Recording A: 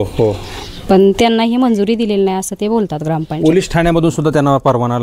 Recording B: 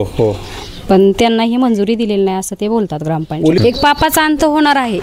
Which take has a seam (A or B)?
B